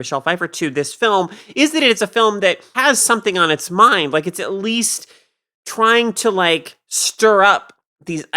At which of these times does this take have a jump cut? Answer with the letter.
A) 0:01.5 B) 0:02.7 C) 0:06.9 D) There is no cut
B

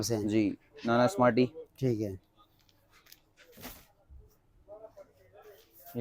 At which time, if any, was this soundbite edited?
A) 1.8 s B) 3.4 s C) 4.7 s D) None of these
B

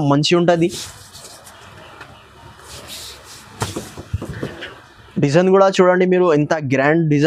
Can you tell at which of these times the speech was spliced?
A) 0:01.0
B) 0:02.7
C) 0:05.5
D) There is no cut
D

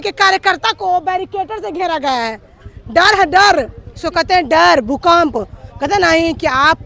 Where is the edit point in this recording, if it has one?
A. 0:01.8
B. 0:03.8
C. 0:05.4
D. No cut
D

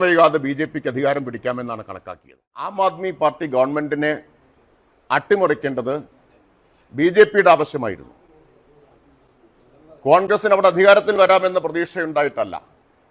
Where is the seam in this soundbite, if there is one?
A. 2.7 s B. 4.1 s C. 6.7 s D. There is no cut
A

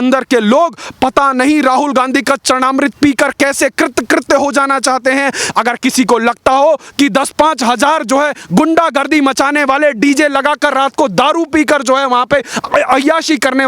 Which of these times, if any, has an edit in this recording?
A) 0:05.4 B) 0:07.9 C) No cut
A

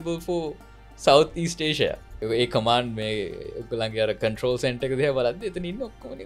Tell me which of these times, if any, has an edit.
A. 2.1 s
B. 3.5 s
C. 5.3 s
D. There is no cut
A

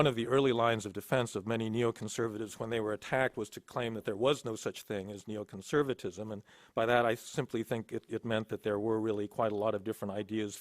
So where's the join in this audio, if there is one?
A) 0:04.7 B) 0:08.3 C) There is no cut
B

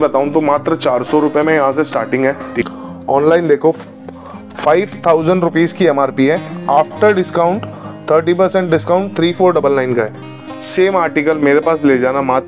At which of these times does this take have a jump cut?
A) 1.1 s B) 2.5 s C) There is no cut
B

